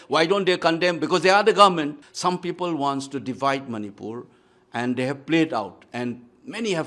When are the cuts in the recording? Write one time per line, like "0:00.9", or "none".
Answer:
0:02.1